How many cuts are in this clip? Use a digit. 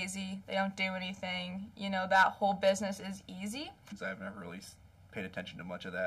1